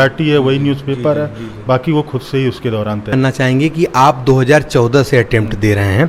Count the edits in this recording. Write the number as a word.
one